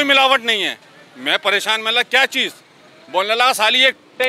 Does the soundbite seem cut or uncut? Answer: uncut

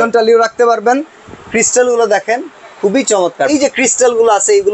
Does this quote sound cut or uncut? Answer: cut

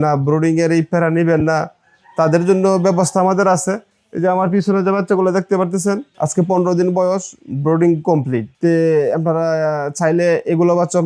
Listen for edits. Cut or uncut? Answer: uncut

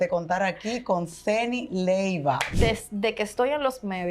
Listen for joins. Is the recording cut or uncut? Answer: cut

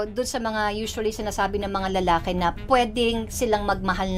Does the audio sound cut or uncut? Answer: uncut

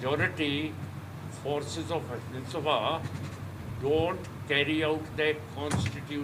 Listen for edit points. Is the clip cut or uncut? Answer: uncut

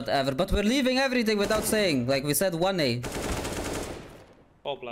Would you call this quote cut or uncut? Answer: uncut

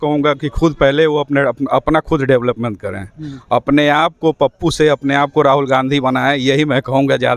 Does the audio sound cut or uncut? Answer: uncut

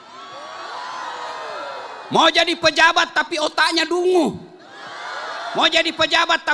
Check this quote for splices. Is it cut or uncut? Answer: uncut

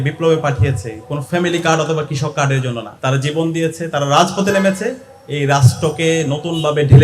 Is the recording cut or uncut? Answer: cut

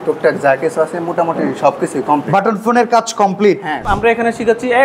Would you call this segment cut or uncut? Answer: cut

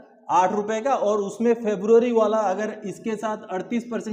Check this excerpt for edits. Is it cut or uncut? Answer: uncut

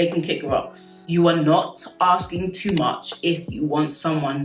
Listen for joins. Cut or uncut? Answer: uncut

